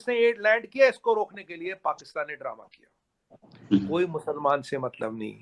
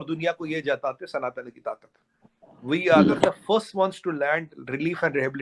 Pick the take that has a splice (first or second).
second